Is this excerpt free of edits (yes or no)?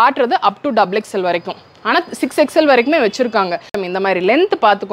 no